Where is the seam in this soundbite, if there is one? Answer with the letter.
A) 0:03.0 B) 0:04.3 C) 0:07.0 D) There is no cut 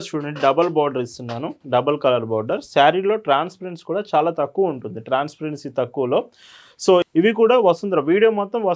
C